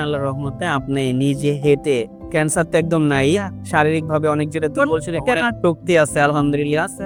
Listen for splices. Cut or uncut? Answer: uncut